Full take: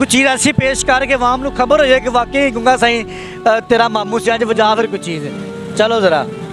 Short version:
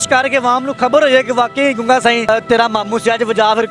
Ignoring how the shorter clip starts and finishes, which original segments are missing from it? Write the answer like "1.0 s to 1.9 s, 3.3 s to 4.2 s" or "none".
3.1 s to 3.5 s